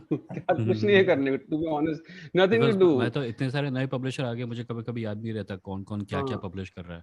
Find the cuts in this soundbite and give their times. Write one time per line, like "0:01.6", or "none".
0:03.2